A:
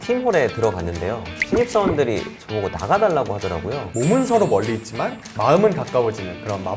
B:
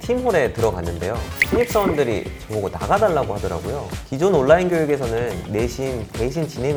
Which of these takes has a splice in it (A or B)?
A